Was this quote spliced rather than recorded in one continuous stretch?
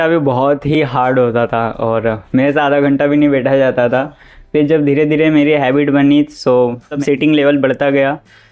no; 0 cuts

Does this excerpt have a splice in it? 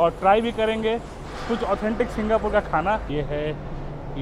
yes; 1 cut; at 3.1 s

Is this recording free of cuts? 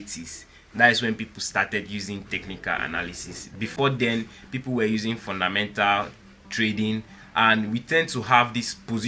yes; 0 cuts

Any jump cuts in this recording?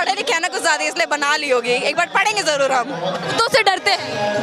yes; 1 cut; at 3.2 s

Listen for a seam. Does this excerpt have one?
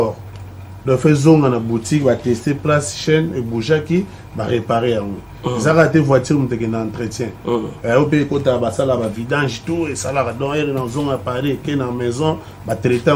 no; 0 cuts

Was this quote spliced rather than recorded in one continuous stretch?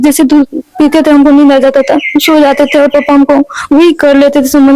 no; 0 cuts

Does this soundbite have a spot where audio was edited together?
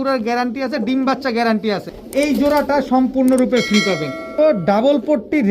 yes; 2 cuts; at 1.9 s, 4.3 s

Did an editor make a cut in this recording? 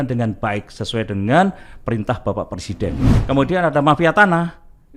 yes; 1 cut; at 3.1 s

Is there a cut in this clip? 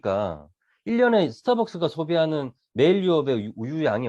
no; 0 cuts

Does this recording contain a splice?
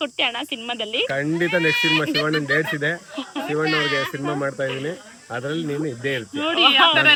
no; 0 cuts

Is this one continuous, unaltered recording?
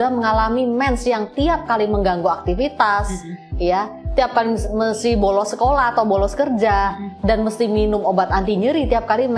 yes; 0 cuts

